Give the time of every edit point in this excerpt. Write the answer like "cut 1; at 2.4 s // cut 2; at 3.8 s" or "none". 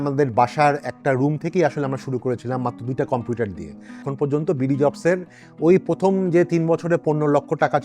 cut 1; at 4.0 s